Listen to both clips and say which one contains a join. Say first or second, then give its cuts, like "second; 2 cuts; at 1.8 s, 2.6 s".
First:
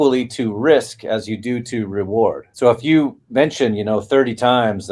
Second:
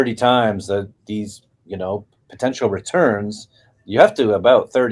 first; 1 cut; at 2.5 s